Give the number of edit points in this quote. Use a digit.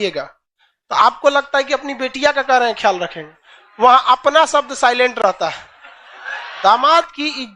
1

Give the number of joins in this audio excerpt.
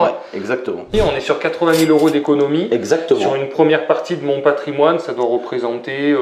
1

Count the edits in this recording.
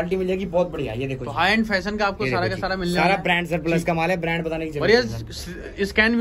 0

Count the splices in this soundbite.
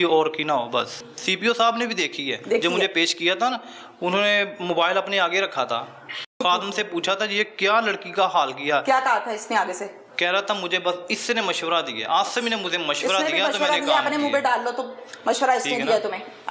2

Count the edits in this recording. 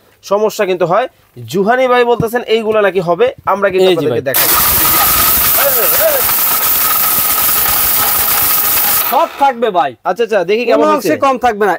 1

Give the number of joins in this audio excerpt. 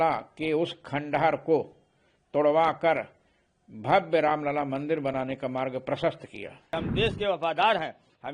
1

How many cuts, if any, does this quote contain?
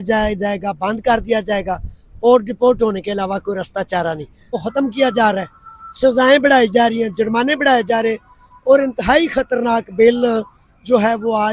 1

